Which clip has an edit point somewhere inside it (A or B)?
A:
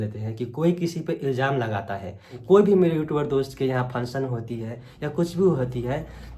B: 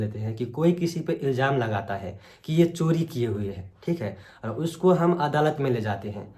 A